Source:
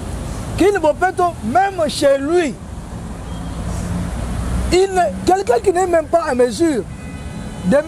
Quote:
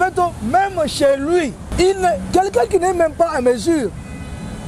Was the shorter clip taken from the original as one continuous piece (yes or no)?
no